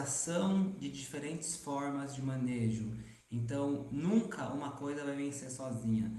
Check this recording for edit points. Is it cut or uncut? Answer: uncut